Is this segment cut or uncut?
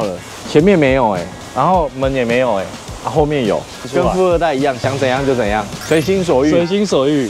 uncut